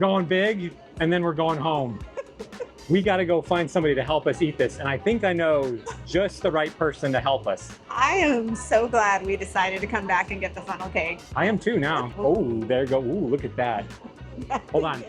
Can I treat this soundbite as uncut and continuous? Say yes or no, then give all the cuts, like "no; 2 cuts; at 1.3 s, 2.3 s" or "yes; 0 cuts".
no; 1 cut; at 12.1 s